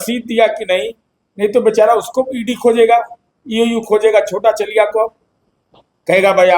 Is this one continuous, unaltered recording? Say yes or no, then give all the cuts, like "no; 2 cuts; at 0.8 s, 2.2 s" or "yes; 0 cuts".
yes; 0 cuts